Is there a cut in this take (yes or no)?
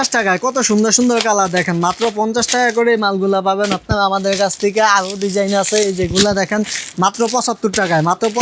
no